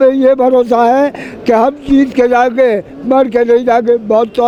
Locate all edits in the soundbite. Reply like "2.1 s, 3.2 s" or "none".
none